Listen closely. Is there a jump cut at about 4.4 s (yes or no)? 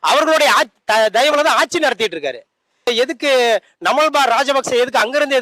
no